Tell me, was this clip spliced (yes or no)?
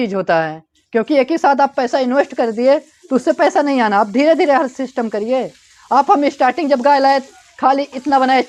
no